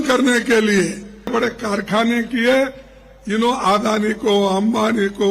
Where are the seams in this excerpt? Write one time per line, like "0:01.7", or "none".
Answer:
0:01.3